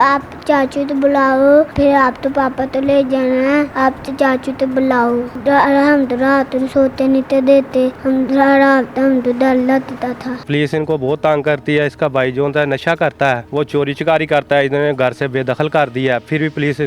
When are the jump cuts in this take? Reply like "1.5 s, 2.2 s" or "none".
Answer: 1.7 s, 3.7 s, 5.3 s, 8.0 s, 10.4 s, 13.4 s